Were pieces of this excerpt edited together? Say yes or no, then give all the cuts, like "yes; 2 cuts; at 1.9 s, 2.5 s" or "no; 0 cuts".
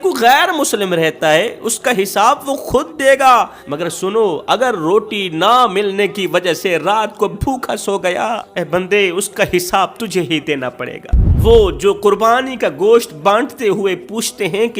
yes; 3 cuts; at 3.6 s, 8.5 s, 11.2 s